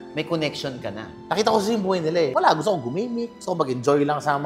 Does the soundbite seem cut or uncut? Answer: cut